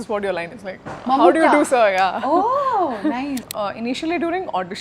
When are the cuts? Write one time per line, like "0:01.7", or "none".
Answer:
0:03.5